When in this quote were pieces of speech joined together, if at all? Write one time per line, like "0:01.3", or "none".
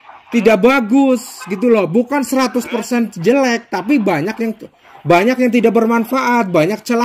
none